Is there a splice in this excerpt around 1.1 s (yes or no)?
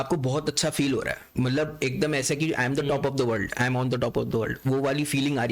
no